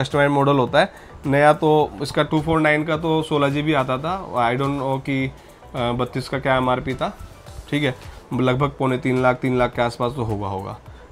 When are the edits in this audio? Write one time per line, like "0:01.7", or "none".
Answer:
none